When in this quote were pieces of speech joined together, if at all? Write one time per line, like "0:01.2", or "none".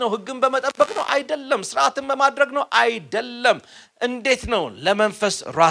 none